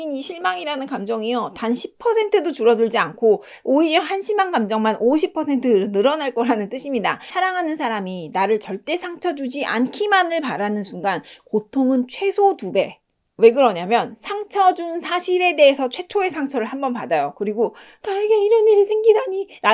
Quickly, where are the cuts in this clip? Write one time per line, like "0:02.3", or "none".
0:07.3